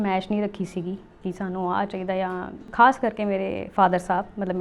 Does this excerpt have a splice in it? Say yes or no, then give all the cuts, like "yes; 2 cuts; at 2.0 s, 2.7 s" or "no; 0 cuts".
yes; 1 cut; at 2.6 s